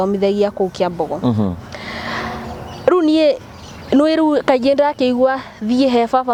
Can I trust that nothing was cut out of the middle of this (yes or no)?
yes